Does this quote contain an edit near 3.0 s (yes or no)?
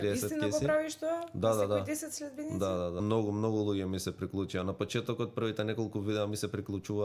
yes